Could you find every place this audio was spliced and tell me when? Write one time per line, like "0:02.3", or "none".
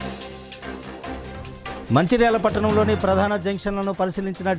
0:01.5